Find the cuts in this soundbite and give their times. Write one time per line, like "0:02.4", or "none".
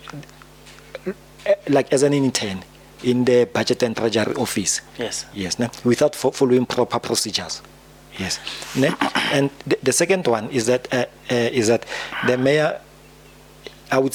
none